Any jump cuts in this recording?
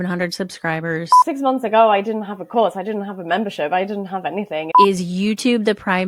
yes; 2 cuts; at 1.2 s, 4.7 s

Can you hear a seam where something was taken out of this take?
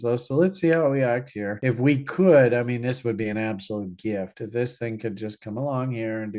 no; 0 cuts

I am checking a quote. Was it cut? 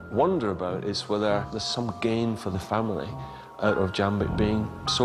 yes; 1 cut; at 1.6 s

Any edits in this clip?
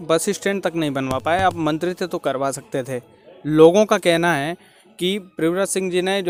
no; 0 cuts

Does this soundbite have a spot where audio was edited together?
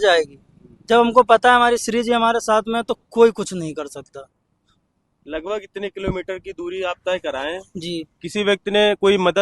no; 0 cuts

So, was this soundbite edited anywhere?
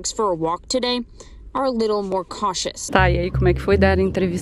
yes; 1 cut; at 2.8 s

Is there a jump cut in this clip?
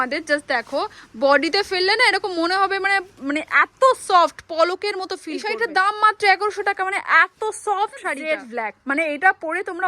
yes; 2 cuts; at 5.5 s, 8.2 s

